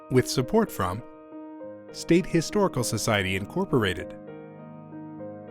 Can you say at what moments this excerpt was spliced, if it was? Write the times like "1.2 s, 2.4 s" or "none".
4.0 s